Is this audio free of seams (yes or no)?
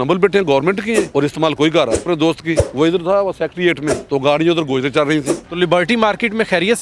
no